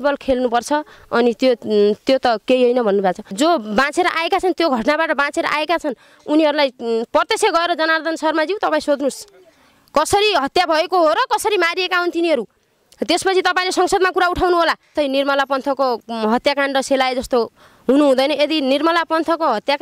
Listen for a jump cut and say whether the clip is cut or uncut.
cut